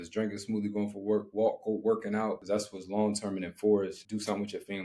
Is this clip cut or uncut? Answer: cut